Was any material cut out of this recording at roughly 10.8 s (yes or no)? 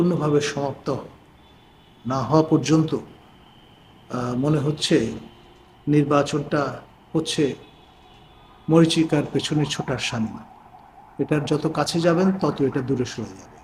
no